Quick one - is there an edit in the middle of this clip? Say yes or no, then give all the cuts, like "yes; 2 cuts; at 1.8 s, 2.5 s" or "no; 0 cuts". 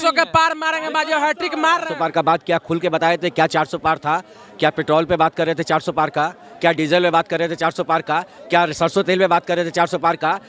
yes; 1 cut; at 1.9 s